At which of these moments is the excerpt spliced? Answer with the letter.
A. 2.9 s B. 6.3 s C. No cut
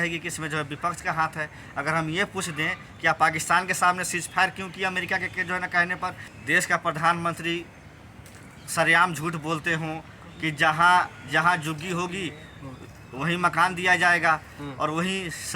B